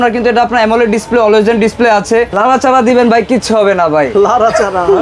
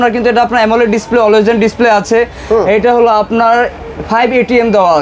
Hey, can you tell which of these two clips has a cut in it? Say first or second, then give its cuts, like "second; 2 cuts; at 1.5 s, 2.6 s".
first; 1 cut; at 2.3 s